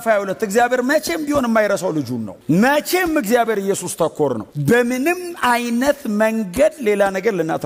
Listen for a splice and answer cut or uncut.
uncut